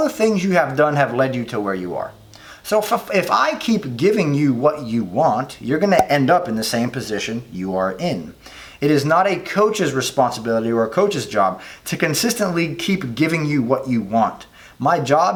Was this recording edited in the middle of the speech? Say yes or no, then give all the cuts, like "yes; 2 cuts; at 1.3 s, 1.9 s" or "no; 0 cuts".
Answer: no; 0 cuts